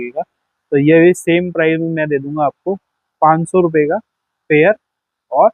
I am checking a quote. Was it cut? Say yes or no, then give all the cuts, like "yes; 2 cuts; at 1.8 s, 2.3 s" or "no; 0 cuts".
no; 0 cuts